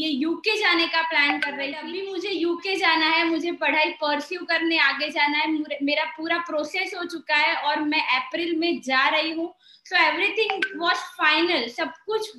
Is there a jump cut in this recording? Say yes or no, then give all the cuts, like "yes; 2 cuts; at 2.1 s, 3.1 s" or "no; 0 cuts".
yes; 1 cut; at 2.0 s